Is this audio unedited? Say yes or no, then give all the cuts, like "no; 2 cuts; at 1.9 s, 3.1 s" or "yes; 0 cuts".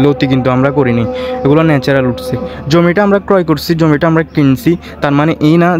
yes; 0 cuts